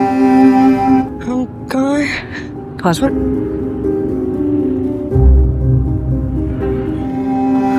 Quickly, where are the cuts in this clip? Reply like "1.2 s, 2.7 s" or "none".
none